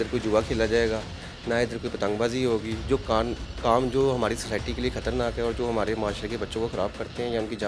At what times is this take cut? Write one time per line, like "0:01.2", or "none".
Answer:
none